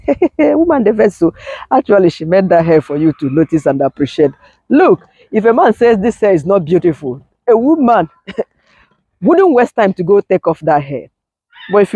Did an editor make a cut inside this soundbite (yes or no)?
no